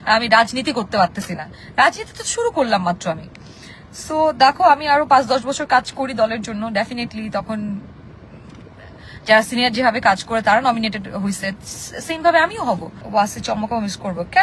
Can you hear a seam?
yes; 1 cut; at 13.0 s

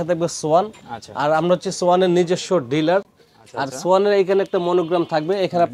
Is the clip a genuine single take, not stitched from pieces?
yes; 0 cuts

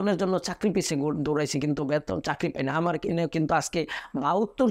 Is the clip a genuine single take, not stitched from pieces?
yes; 0 cuts

